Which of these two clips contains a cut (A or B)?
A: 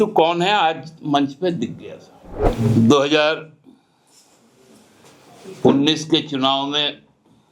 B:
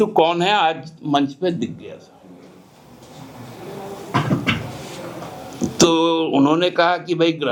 A